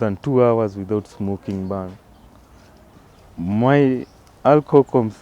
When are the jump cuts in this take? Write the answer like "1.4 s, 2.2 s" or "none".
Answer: 2.9 s